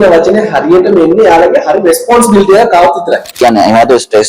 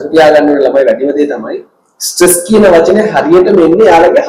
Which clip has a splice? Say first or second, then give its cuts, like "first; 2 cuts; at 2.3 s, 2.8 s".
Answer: first; 1 cut; at 3.3 s